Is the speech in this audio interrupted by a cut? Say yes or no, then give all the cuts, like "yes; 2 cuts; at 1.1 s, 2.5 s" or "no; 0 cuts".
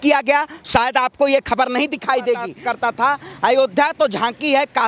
yes; 1 cut; at 2.5 s